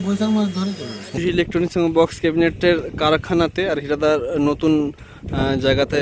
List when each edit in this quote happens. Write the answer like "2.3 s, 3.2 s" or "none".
1.1 s